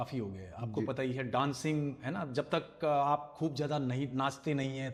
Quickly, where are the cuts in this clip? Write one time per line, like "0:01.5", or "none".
none